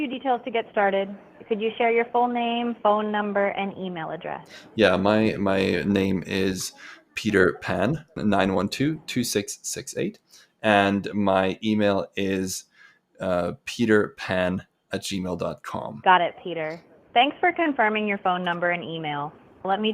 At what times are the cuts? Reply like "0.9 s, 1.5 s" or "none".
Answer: 8.2 s, 16.0 s